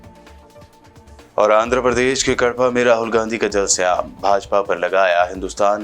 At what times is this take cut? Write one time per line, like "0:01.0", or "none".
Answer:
none